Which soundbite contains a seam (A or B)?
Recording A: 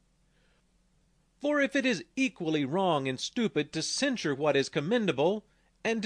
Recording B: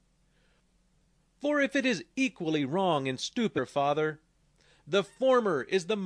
A